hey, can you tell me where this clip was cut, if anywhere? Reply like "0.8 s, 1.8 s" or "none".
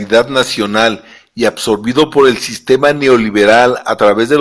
1.2 s